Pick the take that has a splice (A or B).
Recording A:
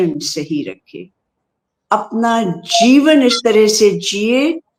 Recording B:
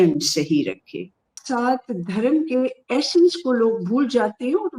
B